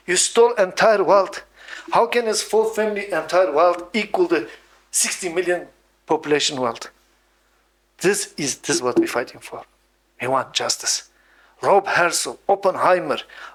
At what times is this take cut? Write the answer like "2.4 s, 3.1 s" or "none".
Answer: none